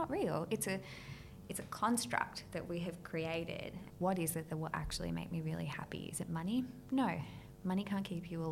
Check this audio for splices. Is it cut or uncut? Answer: cut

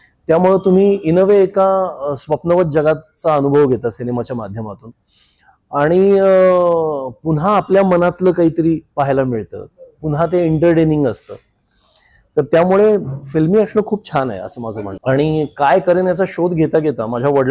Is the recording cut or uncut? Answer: cut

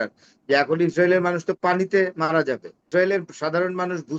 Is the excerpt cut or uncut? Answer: cut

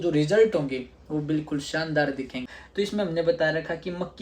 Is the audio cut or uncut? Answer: cut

